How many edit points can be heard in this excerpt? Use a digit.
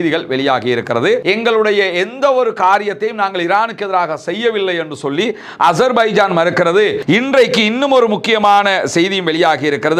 2